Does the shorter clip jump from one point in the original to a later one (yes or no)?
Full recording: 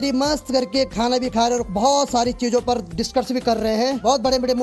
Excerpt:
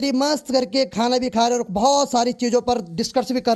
no